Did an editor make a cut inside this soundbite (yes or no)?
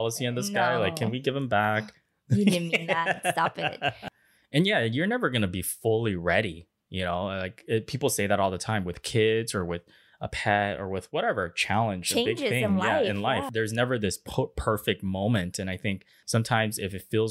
yes